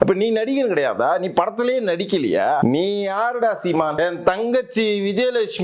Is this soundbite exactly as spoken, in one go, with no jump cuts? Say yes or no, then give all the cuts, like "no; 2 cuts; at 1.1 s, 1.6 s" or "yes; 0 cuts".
no; 2 cuts; at 2.6 s, 4.0 s